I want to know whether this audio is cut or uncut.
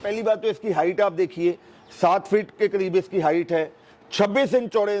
uncut